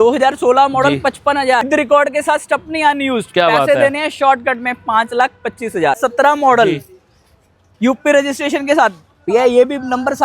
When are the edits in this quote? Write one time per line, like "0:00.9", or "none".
0:01.7
0:06.0

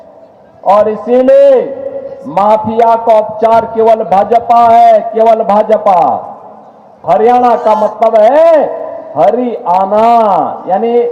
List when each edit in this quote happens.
0:07.0

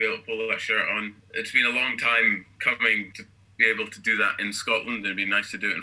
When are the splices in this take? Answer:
0:01.2
0:03.1

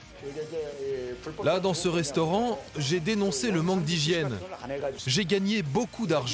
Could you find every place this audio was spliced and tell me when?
0:05.0

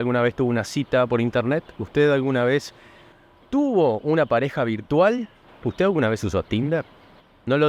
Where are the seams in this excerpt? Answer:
none

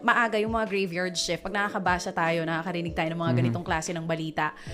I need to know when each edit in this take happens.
0:01.7

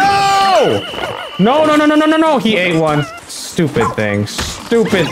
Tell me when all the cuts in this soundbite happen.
0:03.1

